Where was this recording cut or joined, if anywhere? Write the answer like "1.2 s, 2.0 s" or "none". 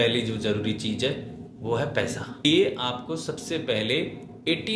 2.4 s